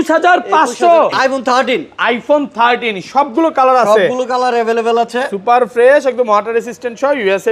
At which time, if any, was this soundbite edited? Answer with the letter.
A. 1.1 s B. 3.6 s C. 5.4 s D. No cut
A